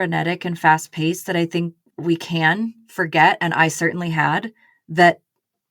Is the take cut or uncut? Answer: cut